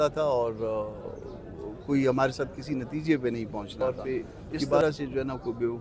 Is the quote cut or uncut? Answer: cut